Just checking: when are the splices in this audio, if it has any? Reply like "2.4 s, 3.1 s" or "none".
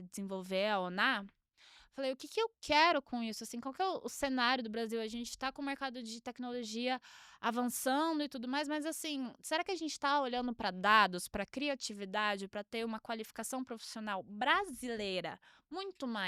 none